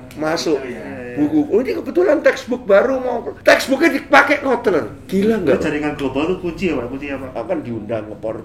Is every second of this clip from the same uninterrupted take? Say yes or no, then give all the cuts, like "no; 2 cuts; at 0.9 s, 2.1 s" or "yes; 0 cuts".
no; 2 cuts; at 3.3 s, 7.1 s